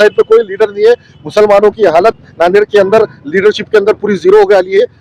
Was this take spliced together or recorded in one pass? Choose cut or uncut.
uncut